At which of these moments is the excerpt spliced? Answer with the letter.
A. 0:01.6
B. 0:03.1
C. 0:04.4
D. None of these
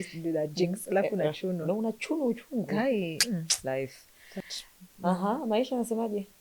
D